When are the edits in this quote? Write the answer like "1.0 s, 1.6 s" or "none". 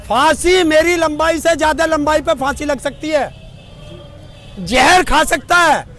none